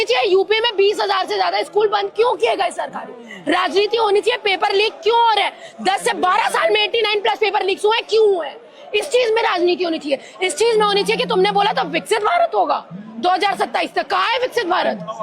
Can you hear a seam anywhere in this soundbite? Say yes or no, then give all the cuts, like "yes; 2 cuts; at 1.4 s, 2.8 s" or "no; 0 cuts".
no; 0 cuts